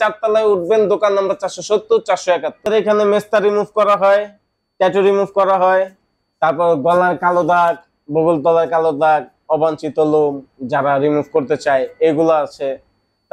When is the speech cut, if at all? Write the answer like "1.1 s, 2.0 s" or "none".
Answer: 2.7 s